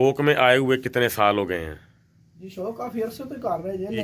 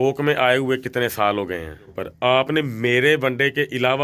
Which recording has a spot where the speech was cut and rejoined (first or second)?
second